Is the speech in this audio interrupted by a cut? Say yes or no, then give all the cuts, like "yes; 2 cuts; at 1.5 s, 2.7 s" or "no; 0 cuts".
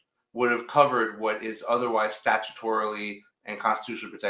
no; 0 cuts